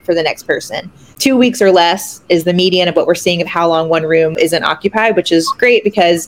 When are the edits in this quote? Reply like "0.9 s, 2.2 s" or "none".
1.1 s, 4.4 s